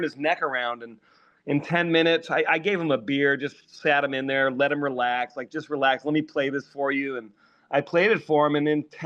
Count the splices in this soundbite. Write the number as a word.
zero